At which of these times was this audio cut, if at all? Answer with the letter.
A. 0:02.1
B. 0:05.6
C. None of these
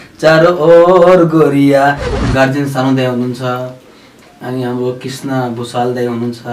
A